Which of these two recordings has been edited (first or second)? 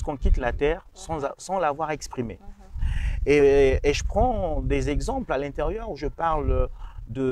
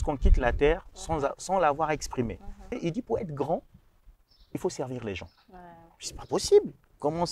second